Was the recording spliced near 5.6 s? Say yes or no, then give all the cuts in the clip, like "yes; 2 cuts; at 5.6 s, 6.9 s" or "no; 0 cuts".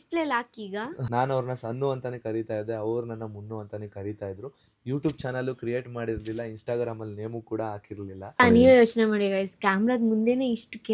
no; 2 cuts; at 0.9 s, 8.4 s